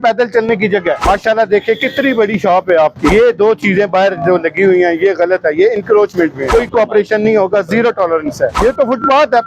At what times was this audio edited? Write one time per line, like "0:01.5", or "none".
0:01.0
0:03.1
0:06.4
0:08.6